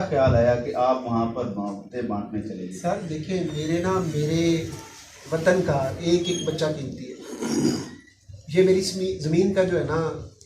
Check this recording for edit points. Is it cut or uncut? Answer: uncut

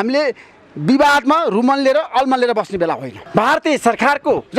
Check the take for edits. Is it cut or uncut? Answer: cut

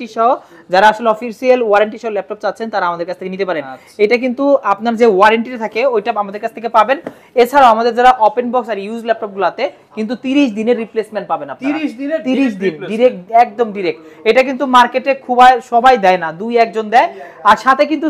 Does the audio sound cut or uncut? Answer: uncut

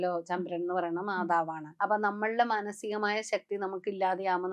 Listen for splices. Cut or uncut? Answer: cut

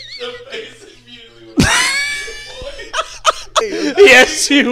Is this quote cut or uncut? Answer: cut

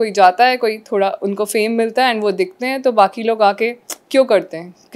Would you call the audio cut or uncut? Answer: uncut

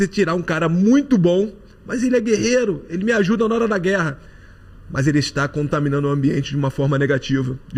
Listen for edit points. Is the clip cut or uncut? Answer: uncut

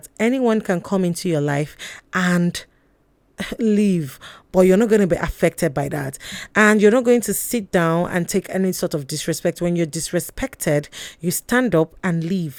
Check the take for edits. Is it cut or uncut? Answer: uncut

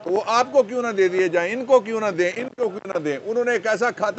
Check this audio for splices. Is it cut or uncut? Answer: uncut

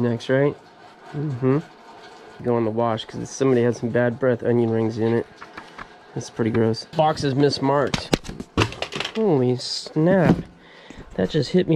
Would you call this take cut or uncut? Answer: cut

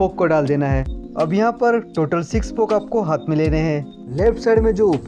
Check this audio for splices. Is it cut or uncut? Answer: cut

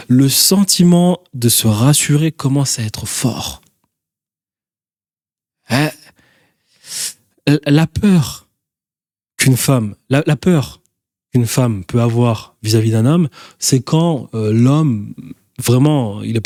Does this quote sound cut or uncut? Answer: uncut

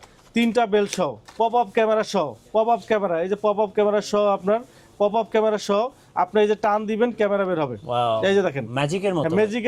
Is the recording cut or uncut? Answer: cut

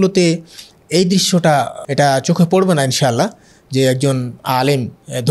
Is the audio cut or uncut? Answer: cut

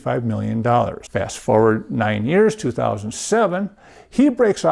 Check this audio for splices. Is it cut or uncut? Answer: cut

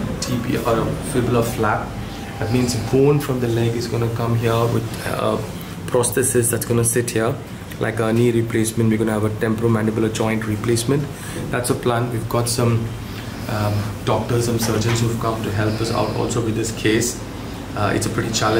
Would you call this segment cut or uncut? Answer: uncut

